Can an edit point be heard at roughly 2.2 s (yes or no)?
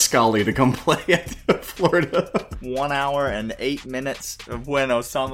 yes